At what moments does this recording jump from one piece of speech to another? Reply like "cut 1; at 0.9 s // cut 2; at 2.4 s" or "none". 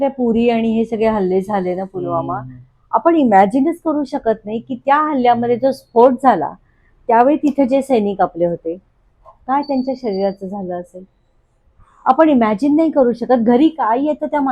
none